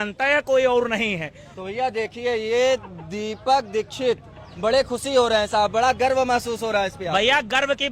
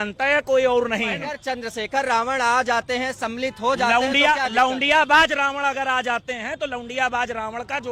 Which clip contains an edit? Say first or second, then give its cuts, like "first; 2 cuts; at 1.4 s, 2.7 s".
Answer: second; 1 cut; at 1.3 s